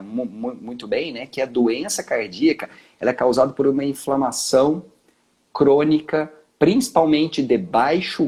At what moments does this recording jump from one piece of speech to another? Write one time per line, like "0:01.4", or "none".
none